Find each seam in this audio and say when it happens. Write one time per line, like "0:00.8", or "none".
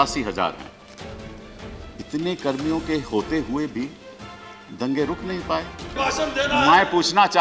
0:05.9